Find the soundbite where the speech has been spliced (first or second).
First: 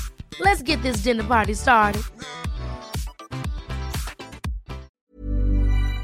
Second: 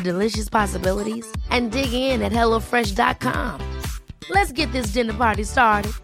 first